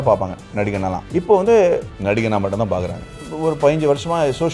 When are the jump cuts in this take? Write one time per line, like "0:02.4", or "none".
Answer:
0:01.0
0:01.9
0:03.2